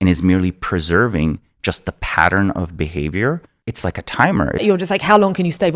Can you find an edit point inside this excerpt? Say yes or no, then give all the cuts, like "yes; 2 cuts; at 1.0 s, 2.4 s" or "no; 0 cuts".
yes; 2 cuts; at 3.5 s, 4.6 s